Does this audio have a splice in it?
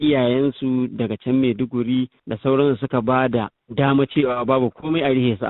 yes; 2 cuts; at 2.2 s, 3.6 s

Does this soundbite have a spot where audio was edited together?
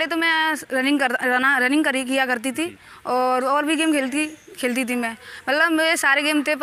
no; 0 cuts

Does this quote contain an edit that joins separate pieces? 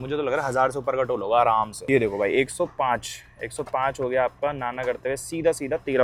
no; 0 cuts

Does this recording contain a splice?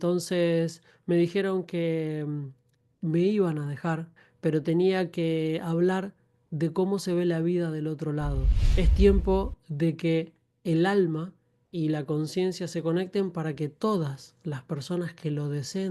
yes; 2 cuts; at 4.2 s, 8.6 s

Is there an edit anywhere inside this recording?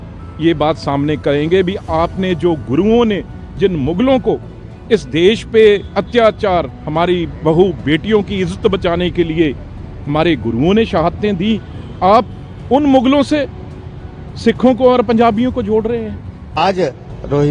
yes; 1 cut; at 16.5 s

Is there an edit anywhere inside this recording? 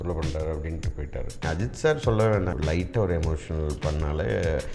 yes; 2 cuts; at 1.3 s, 2.5 s

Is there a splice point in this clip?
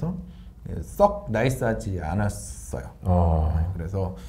no; 0 cuts

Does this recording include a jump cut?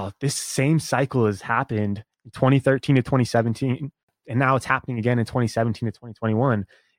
yes; 1 cut; at 4.1 s

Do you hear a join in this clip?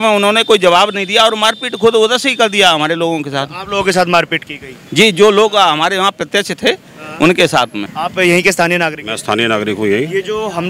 no; 0 cuts

